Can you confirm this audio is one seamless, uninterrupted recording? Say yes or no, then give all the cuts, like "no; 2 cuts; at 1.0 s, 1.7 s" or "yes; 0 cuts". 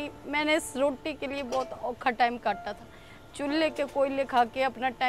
yes; 0 cuts